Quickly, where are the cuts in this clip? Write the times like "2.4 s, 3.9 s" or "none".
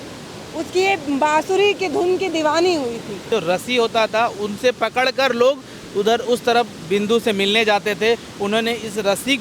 3.3 s, 8.3 s